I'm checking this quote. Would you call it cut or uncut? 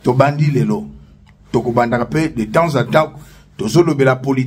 uncut